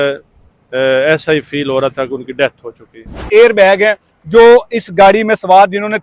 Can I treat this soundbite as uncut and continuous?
no; 1 cut; at 3.3 s

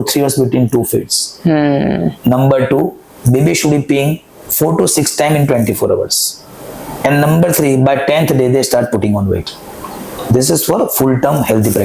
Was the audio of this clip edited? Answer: no; 0 cuts

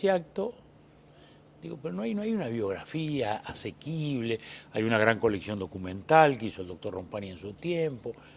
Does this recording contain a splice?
yes; 1 cut; at 5.0 s

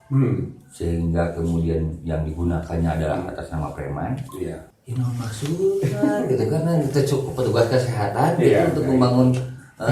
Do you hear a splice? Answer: yes; 1 cut; at 4.8 s

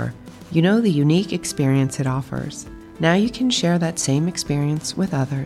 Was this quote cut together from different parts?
no; 0 cuts

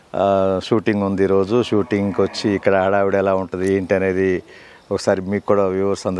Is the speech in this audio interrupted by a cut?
no; 0 cuts

